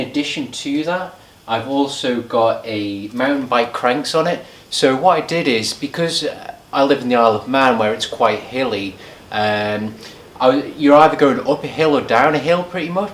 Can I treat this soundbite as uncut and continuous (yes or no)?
no